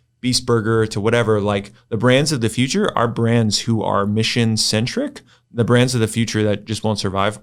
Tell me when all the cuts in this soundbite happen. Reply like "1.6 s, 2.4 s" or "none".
none